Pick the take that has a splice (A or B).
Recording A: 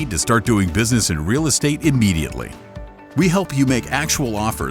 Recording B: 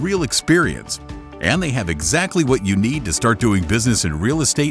A